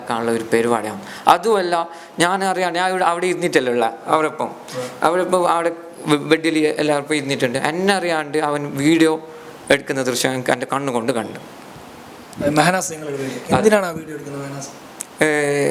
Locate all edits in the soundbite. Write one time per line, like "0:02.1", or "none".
none

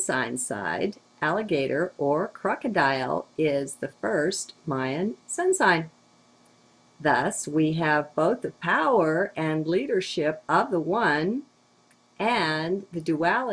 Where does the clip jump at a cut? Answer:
0:08.0

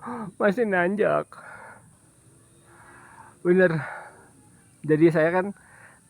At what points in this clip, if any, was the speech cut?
0:01.9

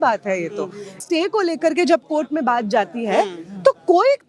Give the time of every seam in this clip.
0:01.0

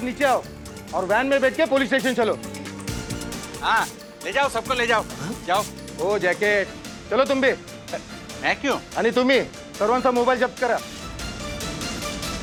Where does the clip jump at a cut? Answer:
none

